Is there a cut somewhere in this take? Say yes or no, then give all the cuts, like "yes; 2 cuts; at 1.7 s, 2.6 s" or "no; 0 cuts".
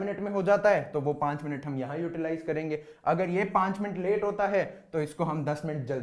no; 0 cuts